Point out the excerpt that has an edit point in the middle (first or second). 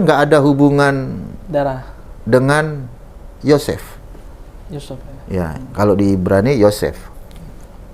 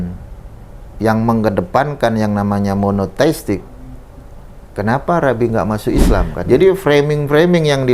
second